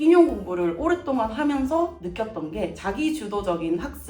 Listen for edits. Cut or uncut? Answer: cut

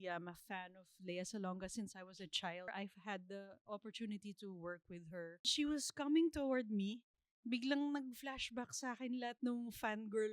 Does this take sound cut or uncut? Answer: cut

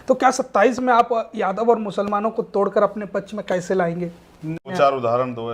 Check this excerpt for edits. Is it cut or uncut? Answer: cut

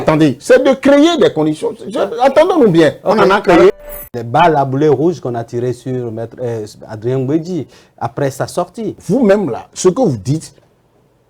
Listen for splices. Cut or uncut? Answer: cut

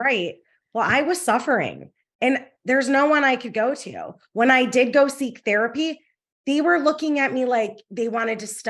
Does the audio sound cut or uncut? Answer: uncut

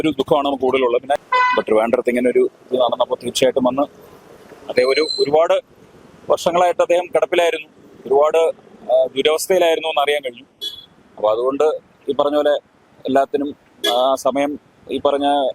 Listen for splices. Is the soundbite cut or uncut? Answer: cut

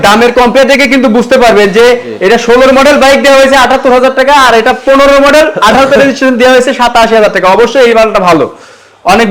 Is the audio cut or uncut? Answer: uncut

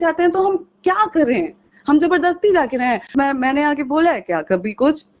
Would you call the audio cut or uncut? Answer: cut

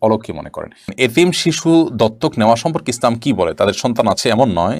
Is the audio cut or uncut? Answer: cut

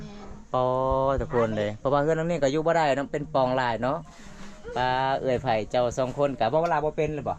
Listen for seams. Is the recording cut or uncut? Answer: uncut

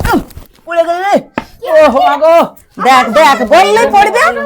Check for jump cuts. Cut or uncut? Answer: cut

